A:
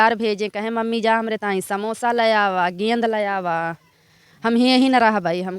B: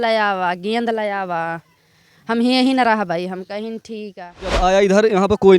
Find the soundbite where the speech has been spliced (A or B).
B